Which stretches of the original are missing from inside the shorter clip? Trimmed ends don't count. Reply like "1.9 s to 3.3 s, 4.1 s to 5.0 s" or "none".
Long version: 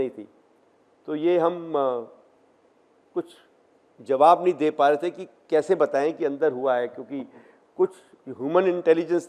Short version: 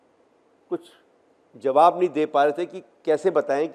none